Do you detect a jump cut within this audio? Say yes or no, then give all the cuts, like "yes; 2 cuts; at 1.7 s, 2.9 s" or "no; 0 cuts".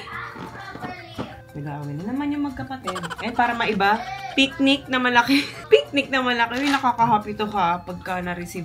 no; 0 cuts